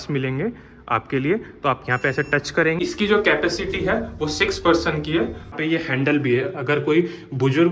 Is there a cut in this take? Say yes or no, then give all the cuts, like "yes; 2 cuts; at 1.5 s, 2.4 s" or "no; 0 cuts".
yes; 2 cuts; at 2.8 s, 5.5 s